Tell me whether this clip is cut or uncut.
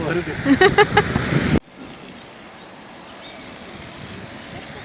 cut